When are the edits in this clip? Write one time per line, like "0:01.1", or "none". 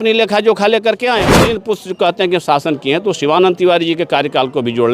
0:01.6